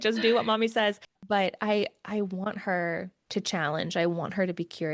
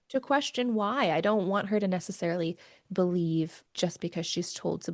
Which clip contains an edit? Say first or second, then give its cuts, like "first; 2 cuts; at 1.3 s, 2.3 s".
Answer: first; 1 cut; at 1.1 s